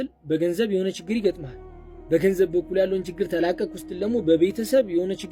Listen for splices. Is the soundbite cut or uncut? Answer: uncut